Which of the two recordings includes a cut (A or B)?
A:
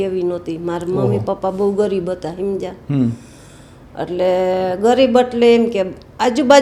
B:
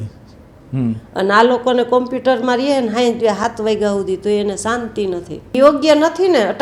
B